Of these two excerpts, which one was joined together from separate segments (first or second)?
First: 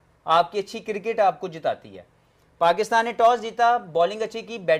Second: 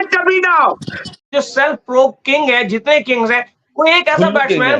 second